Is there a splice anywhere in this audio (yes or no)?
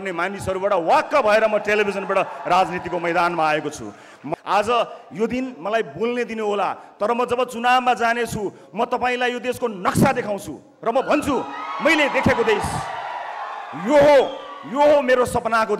yes